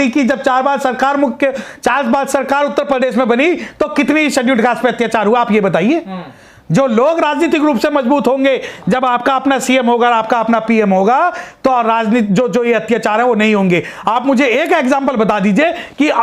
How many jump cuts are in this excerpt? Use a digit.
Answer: 0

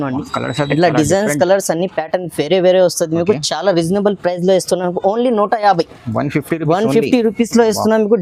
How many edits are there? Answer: 0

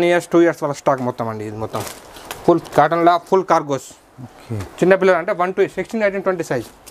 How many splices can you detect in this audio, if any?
0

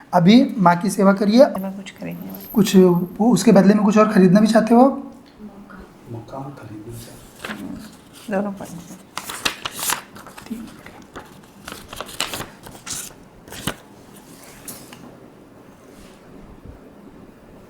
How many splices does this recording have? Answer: 1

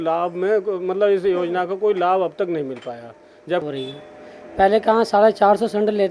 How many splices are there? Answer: 1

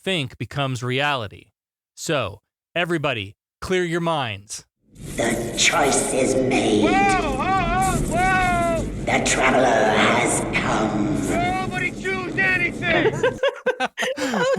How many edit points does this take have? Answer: 1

